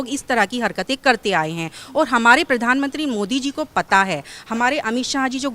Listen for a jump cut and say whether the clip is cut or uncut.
uncut